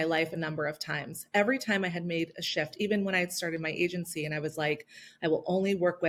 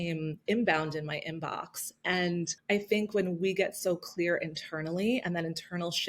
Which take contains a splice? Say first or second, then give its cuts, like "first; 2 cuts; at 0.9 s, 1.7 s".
second; 1 cut; at 2.6 s